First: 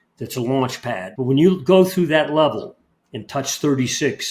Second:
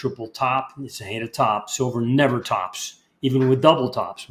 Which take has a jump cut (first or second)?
first